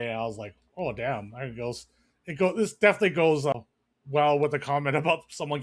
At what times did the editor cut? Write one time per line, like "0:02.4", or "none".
0:03.5